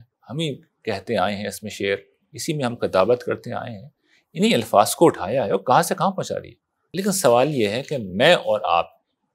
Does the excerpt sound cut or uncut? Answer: cut